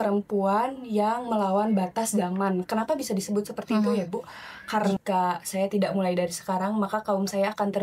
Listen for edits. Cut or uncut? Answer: cut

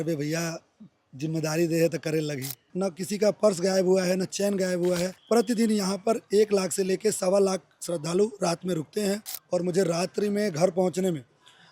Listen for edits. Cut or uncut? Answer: cut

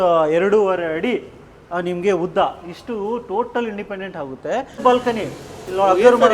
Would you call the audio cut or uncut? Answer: cut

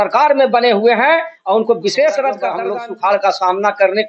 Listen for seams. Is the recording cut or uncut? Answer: cut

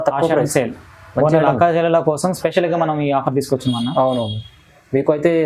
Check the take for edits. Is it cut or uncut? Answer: uncut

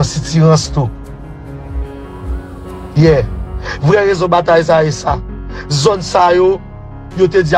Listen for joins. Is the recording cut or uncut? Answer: uncut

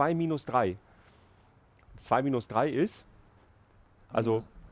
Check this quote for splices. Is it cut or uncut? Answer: uncut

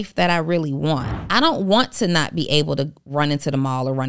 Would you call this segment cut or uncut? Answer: cut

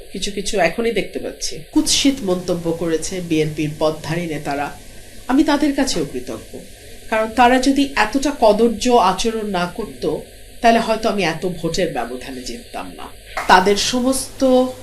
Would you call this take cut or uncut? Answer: cut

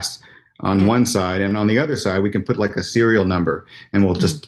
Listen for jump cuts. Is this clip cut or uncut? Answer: uncut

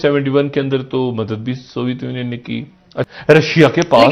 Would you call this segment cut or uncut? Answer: cut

